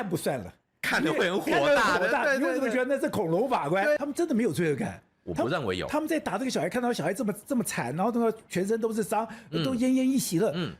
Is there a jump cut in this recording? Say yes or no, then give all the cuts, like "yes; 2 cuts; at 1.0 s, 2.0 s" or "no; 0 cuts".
yes; 1 cut; at 4.0 s